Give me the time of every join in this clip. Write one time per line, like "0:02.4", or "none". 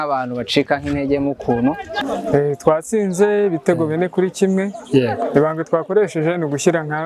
0:02.0